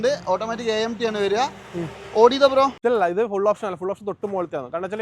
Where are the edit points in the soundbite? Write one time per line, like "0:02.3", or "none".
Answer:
0:02.8